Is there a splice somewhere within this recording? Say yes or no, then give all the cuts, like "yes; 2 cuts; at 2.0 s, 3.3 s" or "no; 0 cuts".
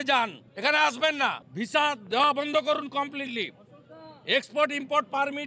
yes; 1 cut; at 1.4 s